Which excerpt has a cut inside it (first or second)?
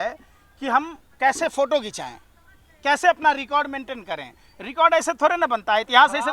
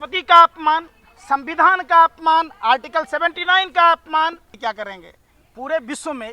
second